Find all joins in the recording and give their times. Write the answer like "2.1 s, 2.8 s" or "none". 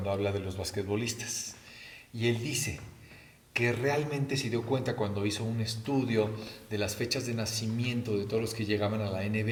none